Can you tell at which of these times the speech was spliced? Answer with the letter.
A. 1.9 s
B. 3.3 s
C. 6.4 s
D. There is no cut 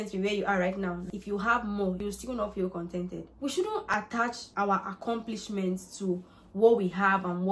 B